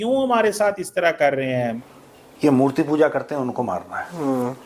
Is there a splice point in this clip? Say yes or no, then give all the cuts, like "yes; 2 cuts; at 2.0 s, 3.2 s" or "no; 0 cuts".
yes; 1 cut; at 1.8 s